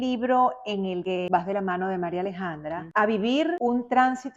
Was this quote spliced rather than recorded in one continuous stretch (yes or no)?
yes